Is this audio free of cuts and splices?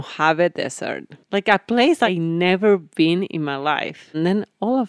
no; 2 cuts; at 2.1 s, 4.1 s

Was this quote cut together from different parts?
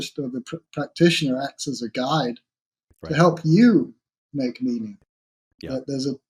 no; 0 cuts

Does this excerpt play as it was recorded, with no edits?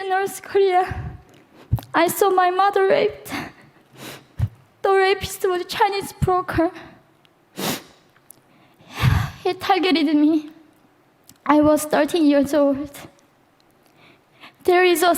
yes; 0 cuts

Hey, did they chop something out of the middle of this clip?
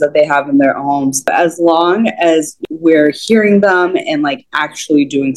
yes; 2 cuts; at 1.3 s, 2.6 s

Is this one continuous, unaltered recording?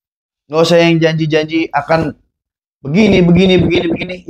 yes; 0 cuts

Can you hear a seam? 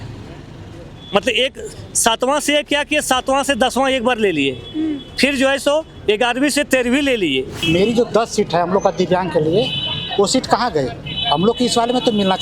yes; 1 cut; at 7.6 s

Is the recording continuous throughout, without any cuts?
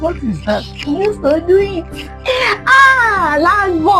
yes; 0 cuts

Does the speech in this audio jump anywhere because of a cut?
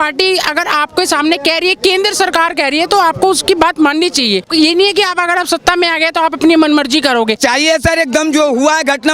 yes; 2 cuts; at 4.5 s, 7.4 s

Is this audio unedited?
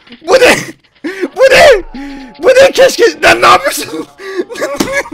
yes; 0 cuts

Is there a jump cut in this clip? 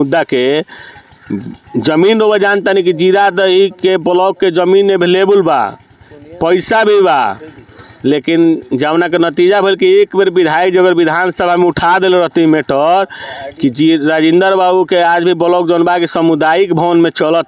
no; 0 cuts

